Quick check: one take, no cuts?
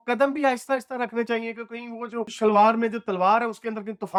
yes; 0 cuts

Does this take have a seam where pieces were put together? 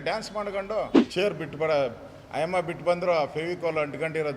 yes; 1 cut; at 1.0 s

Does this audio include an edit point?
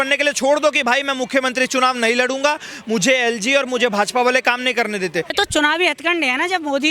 yes; 1 cut; at 5.3 s

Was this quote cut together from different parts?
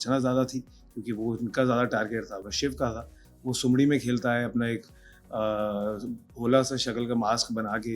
no; 0 cuts

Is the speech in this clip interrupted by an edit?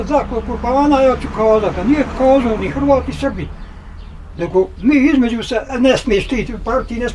no; 0 cuts

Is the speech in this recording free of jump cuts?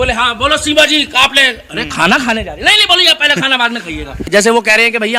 no; 1 cut; at 4.3 s

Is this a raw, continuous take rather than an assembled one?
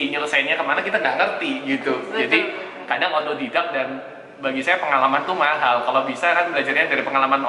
yes; 0 cuts

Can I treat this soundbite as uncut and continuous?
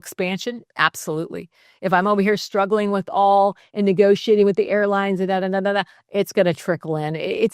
yes; 0 cuts

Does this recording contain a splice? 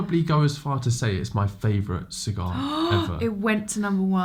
no; 0 cuts

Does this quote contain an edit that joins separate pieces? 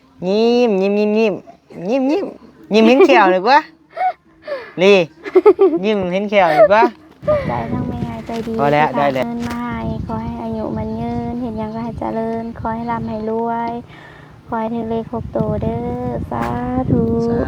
yes; 1 cut; at 9.2 s

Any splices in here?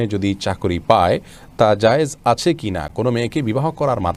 no; 0 cuts

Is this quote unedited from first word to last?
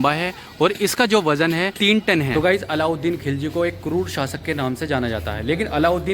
no; 1 cut; at 2.0 s

